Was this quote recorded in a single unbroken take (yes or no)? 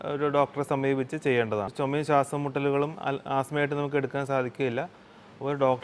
no